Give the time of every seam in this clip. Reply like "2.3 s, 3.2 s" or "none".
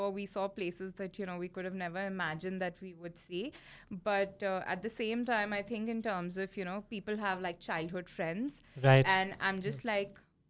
none